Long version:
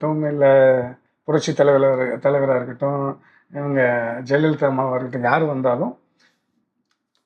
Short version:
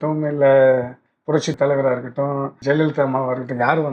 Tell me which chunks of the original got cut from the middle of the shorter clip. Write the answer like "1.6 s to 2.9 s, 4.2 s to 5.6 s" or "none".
1.5 s to 2.1 s, 3.2 s to 4.2 s